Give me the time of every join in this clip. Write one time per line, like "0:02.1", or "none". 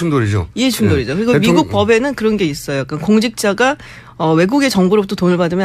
none